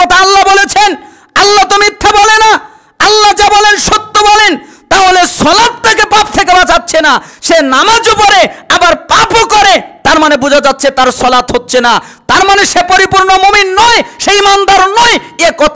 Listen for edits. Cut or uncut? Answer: uncut